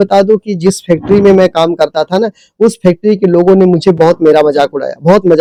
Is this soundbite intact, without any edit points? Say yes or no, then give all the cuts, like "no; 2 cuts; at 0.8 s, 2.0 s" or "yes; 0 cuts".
yes; 0 cuts